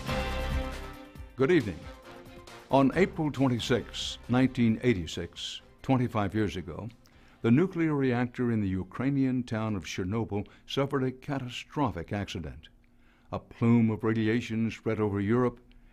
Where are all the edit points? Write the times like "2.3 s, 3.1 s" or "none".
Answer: 14.6 s